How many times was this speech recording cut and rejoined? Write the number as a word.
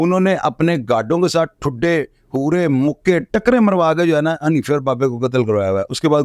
zero